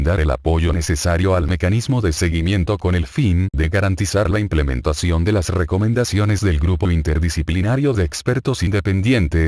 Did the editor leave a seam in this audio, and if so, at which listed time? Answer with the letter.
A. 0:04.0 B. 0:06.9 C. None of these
B